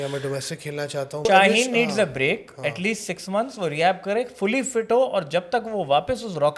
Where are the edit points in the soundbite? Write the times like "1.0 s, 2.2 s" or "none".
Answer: 1.2 s